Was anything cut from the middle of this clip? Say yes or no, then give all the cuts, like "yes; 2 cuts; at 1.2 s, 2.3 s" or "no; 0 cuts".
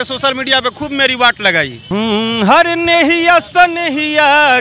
yes; 1 cut; at 1.8 s